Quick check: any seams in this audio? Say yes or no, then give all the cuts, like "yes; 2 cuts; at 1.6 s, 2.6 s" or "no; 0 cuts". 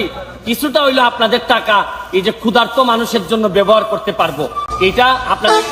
no; 0 cuts